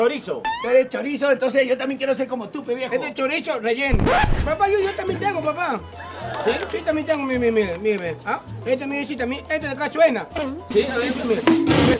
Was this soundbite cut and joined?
yes; 1 cut; at 4.4 s

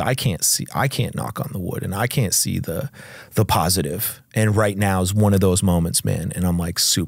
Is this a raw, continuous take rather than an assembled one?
yes; 0 cuts

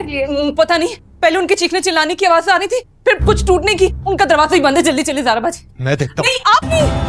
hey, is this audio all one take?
yes; 0 cuts

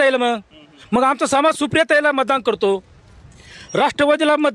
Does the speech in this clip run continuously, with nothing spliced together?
yes; 0 cuts

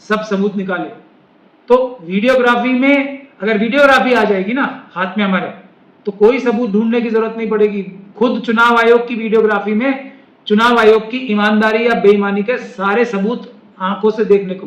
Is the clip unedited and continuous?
yes; 0 cuts

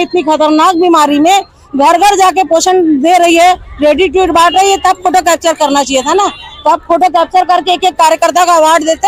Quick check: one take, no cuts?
yes; 0 cuts

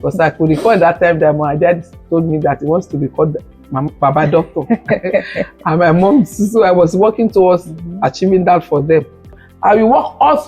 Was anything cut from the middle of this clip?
yes; 1 cut; at 9.5 s

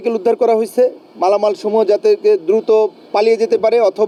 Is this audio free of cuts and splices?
yes; 0 cuts

